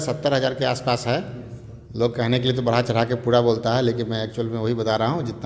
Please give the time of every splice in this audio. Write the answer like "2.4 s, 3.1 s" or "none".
none